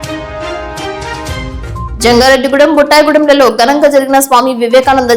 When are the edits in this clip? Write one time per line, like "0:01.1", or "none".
0:01.9

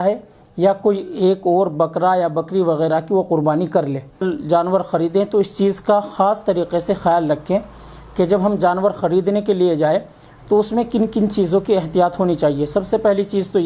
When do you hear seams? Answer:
0:04.2

